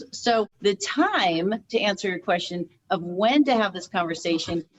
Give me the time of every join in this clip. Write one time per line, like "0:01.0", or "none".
none